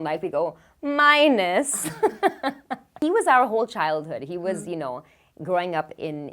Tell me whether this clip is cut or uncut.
cut